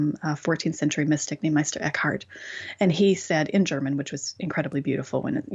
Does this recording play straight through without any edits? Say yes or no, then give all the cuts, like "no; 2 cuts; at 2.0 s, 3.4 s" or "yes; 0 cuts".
yes; 0 cuts